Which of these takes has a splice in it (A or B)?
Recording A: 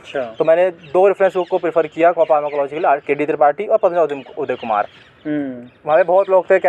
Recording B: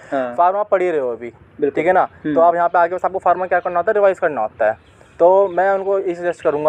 A